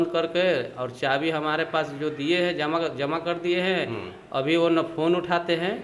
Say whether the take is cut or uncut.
uncut